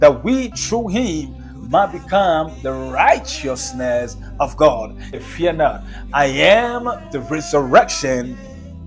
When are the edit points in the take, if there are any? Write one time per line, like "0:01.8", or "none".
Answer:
0:05.2